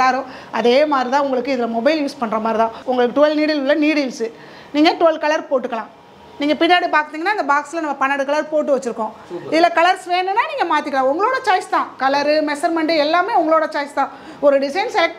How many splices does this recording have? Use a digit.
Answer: 0